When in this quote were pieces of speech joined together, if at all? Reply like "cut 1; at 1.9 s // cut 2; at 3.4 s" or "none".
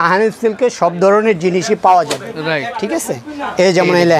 none